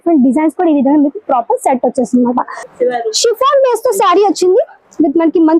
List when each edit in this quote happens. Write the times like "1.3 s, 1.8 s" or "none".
2.6 s